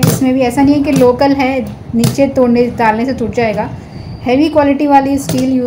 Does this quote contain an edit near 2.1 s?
no; 0 cuts

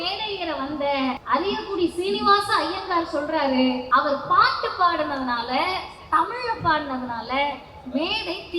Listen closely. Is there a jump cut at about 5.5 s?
no; 2 cuts; at 1.2 s, 3.8 s

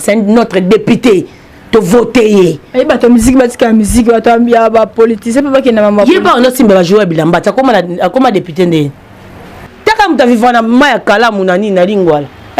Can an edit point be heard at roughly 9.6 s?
yes; 1 cut; at 9.6 s

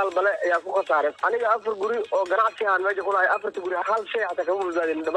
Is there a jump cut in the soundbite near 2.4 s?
no; 1 cut; at 1.2 s

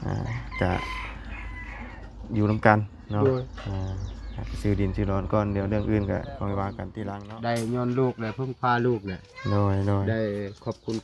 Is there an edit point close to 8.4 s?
no; 1 cut; at 6.8 s

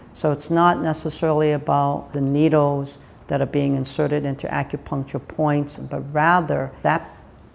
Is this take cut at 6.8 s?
yes; 3 cuts; at 2.1 s, 5.8 s, 6.8 s

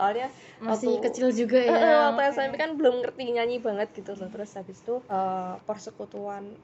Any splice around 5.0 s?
yes; 1 cut; at 5.0 s

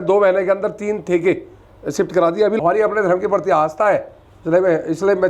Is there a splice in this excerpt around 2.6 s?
yes; 1 cut; at 2.6 s

